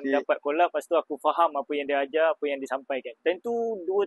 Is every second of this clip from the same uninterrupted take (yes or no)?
no